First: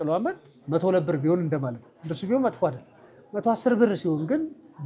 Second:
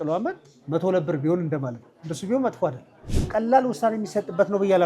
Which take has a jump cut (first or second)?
second